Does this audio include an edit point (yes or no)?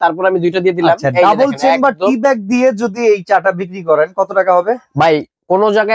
no